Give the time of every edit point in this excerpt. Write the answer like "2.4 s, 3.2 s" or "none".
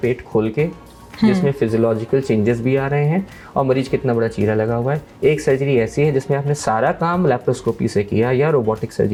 none